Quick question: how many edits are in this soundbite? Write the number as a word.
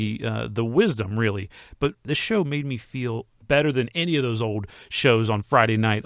one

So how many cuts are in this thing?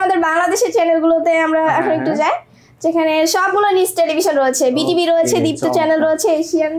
zero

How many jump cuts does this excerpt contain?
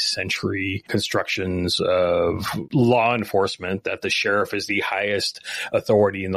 two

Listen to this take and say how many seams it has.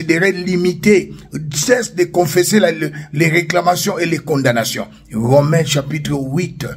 zero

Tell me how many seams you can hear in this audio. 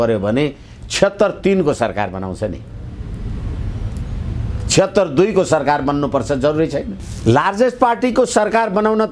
one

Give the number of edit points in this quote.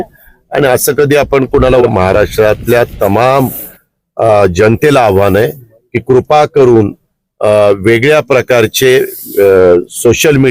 one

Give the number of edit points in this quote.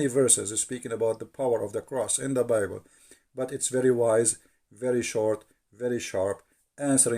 zero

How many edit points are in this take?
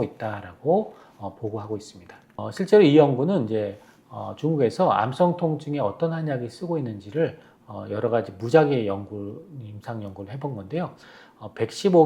one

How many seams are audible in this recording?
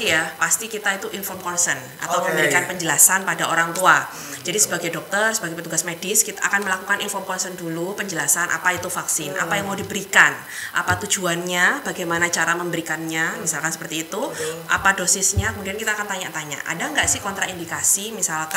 zero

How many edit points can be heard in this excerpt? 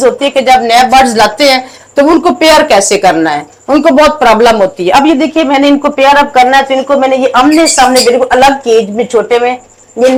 zero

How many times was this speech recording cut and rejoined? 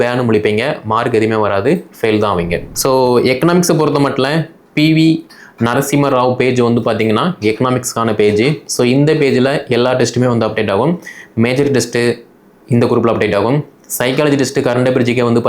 one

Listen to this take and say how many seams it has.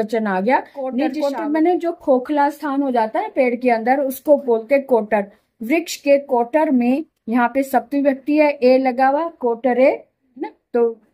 one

